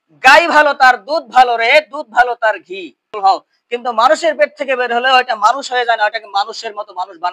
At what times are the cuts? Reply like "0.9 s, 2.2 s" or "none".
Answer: 3.1 s